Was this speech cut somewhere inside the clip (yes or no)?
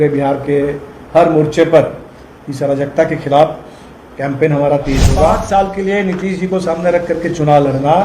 yes